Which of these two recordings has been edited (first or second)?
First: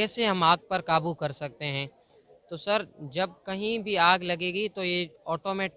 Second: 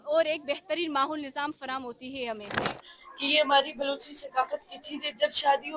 second